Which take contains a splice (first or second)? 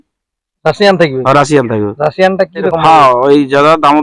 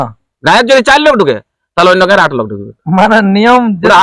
first